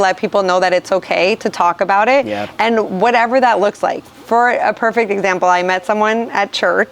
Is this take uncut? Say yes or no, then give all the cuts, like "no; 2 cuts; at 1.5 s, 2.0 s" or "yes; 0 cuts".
yes; 0 cuts